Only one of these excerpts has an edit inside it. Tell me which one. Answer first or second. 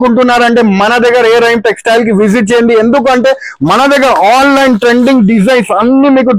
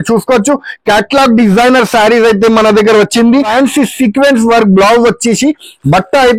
second